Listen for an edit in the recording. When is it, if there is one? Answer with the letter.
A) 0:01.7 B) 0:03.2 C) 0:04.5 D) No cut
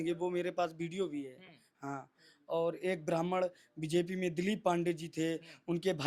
D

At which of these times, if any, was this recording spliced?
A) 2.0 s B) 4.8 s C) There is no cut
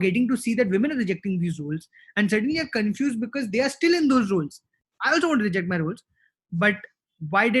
B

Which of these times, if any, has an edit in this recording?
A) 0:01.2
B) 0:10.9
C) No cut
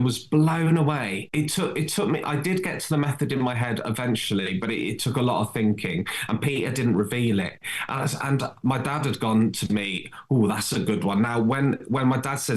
A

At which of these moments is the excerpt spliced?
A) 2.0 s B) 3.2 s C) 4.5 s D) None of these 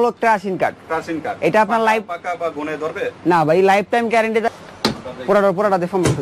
C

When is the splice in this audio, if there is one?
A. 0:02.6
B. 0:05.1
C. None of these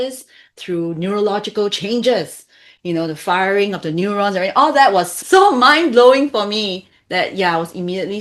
B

